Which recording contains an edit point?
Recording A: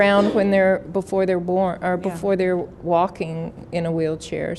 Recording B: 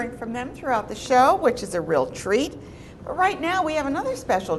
A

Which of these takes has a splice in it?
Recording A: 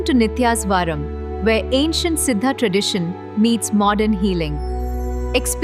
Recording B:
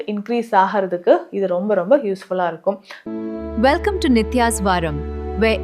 B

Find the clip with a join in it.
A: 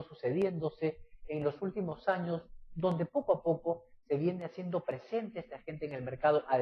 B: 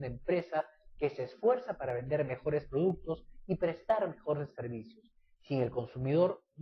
B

